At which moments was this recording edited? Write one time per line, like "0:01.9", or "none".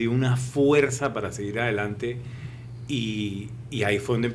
none